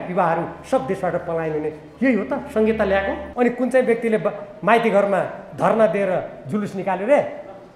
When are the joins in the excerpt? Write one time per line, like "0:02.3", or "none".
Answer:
0:03.2